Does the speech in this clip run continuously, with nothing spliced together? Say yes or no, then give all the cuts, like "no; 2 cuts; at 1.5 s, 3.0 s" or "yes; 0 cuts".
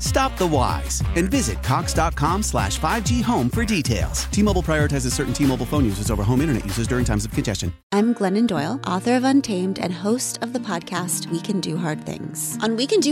no; 1 cut; at 7.7 s